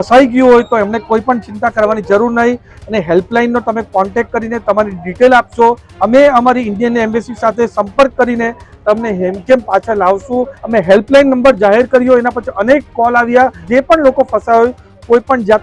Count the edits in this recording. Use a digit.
4